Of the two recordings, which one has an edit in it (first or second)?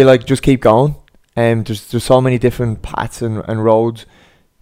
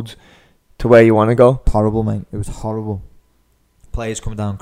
second